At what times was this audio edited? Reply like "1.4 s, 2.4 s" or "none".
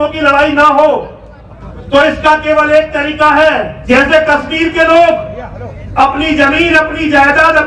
3.7 s